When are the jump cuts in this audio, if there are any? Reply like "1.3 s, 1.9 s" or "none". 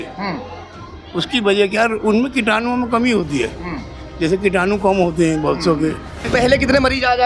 6.2 s